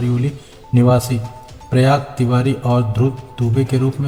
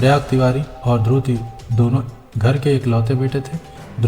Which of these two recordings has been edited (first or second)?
second